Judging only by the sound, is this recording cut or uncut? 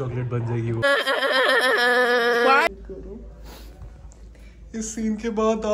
cut